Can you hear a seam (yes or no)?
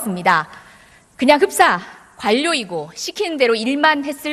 yes